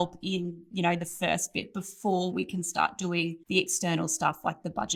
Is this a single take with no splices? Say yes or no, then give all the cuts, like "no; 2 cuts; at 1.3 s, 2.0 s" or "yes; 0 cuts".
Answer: yes; 0 cuts